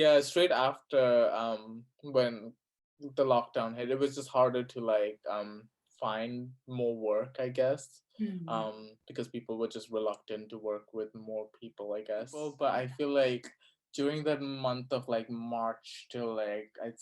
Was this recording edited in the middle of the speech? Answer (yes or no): yes